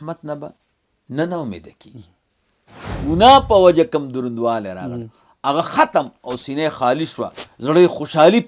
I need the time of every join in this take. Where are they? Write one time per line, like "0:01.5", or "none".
0:03.0